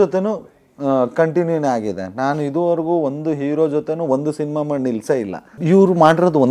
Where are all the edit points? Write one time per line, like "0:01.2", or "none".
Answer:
0:05.5

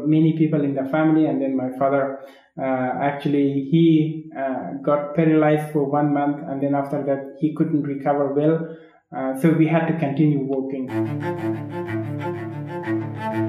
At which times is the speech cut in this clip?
0:10.9

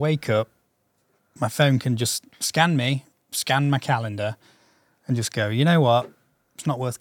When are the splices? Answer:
none

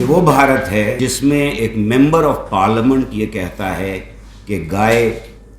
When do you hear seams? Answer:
0:00.9

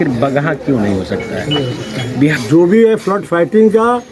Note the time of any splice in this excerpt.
0:02.4

